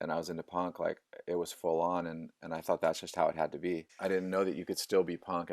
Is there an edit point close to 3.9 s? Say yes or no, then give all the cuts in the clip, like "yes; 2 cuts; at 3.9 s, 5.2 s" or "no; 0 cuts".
yes; 1 cut; at 3.9 s